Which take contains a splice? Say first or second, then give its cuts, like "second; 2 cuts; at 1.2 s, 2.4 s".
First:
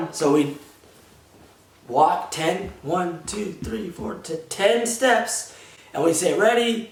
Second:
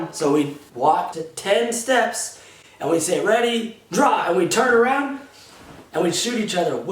second; 1 cut; at 1.0 s